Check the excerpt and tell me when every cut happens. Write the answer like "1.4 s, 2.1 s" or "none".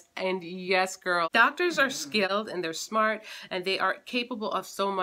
1.3 s, 2.4 s